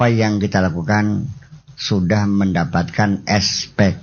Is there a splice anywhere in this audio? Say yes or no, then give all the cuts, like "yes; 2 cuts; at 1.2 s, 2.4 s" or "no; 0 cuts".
no; 0 cuts